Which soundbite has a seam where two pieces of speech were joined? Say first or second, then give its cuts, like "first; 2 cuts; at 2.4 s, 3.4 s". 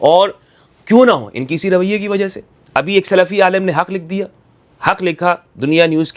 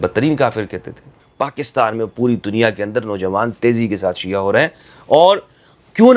second; 1 cut; at 1.2 s